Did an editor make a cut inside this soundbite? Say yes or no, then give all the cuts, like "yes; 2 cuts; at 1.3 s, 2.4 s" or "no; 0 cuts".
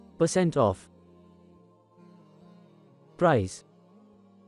yes; 2 cuts; at 0.8 s, 3.2 s